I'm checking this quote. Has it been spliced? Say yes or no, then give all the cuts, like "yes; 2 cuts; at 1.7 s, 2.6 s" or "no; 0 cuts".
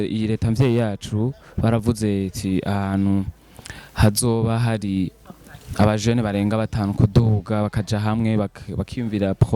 no; 0 cuts